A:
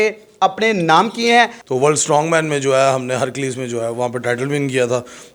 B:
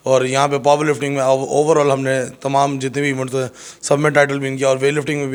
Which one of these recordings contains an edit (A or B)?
A